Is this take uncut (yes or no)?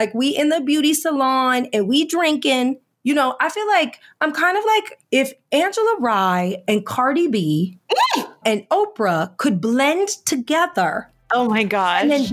no